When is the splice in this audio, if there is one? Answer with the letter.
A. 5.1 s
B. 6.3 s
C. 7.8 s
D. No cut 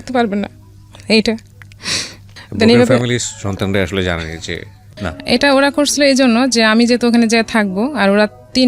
A